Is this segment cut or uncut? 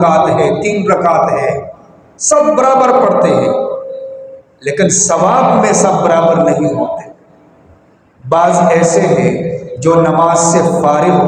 uncut